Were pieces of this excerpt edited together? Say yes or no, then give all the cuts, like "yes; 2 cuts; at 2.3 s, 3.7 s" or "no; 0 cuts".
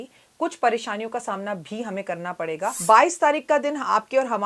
yes; 1 cut; at 2.8 s